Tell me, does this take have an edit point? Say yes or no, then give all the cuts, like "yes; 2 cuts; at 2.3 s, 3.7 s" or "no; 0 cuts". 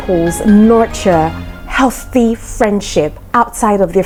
no; 0 cuts